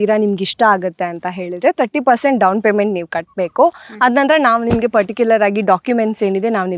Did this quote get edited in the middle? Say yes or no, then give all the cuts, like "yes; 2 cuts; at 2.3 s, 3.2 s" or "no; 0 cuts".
no; 0 cuts